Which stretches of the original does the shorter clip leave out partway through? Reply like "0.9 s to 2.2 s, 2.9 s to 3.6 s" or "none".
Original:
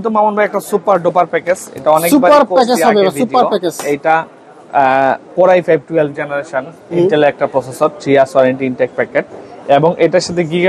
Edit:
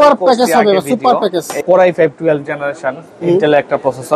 3.9 s to 5.3 s